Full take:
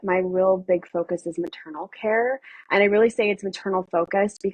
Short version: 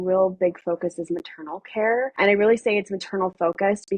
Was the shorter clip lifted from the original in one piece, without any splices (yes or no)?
no